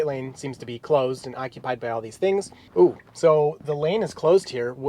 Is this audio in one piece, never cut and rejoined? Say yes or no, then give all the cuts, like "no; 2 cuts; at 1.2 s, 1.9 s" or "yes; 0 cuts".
no; 1 cut; at 2.6 s